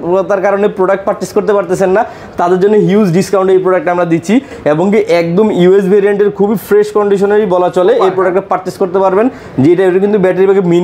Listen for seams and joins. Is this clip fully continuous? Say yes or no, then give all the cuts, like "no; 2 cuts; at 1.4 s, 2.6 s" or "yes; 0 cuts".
yes; 0 cuts